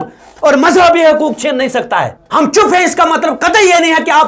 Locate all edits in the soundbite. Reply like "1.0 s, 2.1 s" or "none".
1.8 s

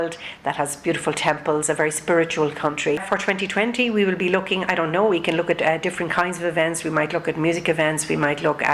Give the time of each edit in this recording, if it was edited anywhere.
3.0 s

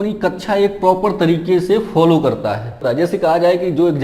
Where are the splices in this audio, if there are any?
2.8 s

